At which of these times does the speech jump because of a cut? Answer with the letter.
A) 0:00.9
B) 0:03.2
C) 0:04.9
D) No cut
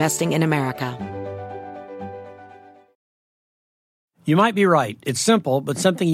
A